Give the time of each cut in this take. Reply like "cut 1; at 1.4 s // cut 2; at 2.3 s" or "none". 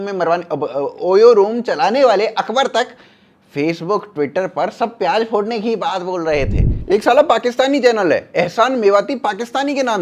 cut 1; at 6.7 s